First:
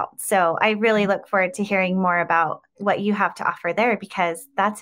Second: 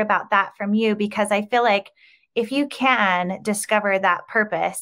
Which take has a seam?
first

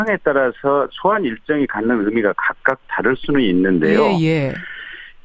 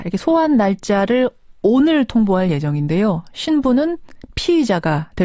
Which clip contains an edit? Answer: first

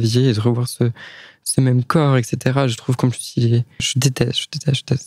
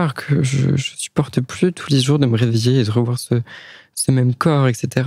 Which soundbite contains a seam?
first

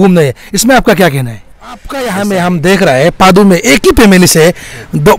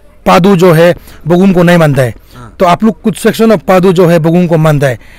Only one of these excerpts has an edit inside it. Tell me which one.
first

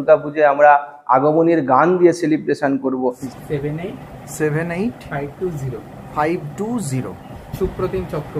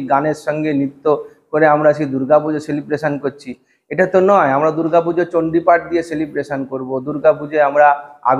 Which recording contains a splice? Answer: first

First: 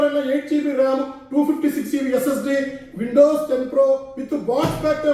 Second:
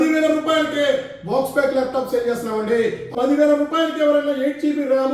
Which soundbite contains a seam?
second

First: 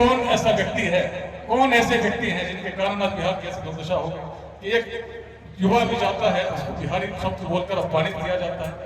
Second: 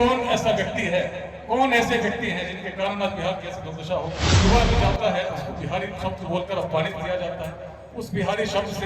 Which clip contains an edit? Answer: second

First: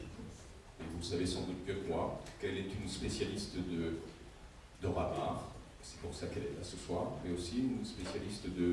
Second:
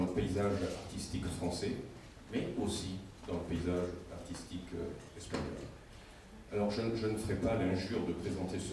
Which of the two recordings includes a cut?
first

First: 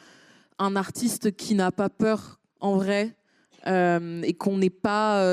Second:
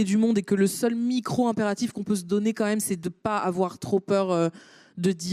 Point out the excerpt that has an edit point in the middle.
second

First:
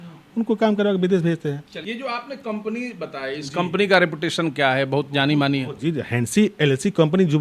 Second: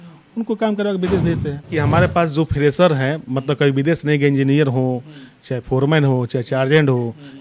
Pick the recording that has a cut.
second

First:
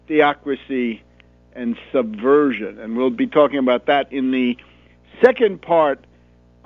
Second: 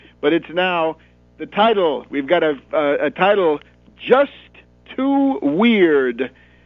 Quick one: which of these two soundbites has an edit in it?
first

